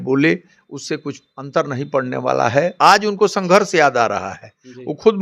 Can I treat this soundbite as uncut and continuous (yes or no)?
no